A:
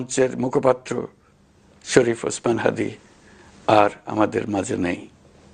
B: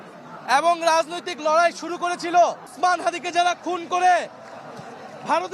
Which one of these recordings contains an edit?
B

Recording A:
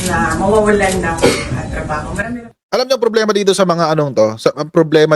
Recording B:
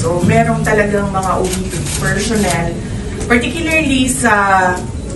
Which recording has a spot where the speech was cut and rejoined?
A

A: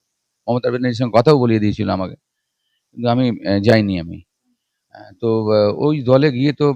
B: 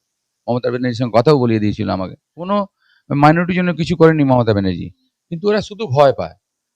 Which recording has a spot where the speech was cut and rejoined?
B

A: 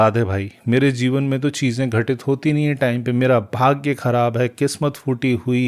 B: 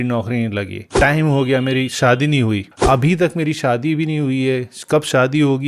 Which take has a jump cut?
B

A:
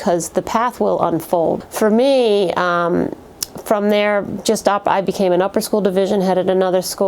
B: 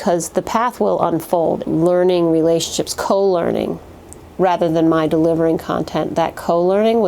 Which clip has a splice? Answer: B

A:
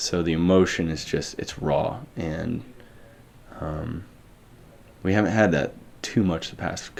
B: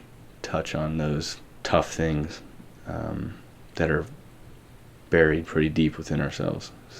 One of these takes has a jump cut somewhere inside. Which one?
B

